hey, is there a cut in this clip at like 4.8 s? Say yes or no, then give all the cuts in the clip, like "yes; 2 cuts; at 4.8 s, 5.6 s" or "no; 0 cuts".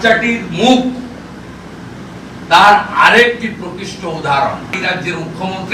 yes; 1 cut; at 4.8 s